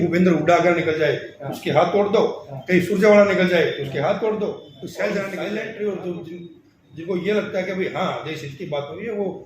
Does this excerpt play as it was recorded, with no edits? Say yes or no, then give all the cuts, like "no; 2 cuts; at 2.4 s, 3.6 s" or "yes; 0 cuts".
no; 1 cut; at 5.3 s